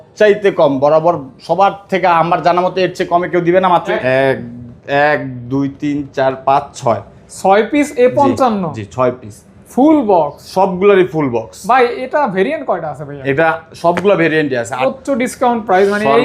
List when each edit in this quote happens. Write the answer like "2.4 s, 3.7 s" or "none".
3.9 s, 14.8 s